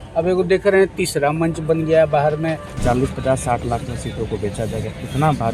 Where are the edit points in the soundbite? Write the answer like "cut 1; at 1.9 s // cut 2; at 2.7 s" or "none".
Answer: cut 1; at 2.8 s